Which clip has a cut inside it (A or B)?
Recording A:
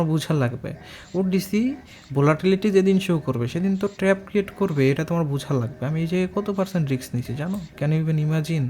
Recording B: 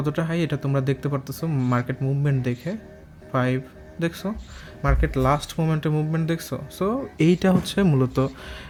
A